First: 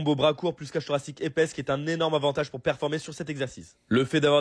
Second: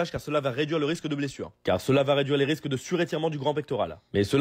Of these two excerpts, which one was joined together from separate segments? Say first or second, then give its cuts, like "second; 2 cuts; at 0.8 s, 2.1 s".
second; 1 cut; at 1.5 s